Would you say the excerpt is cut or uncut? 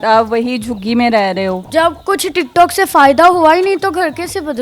cut